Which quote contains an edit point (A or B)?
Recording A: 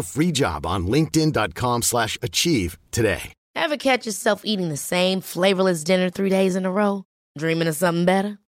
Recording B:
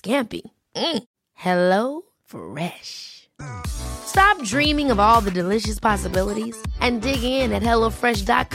A